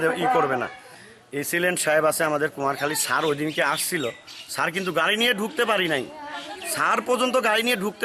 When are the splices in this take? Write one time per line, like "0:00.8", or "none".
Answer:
0:00.9